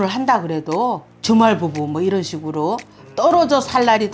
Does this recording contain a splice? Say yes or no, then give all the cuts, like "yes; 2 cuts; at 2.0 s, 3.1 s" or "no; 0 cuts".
yes; 1 cut; at 1.1 s